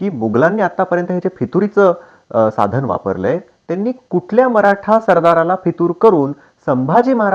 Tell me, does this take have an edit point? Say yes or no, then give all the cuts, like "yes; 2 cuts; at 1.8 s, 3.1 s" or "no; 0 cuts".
no; 0 cuts